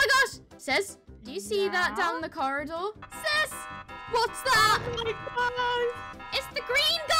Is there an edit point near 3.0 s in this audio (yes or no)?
yes